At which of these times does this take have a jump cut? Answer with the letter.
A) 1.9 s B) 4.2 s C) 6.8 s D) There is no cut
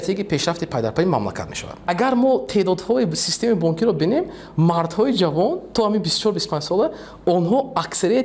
A